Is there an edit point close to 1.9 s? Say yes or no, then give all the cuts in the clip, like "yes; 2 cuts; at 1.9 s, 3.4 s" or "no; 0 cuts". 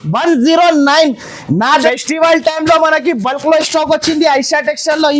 yes; 1 cut; at 1.9 s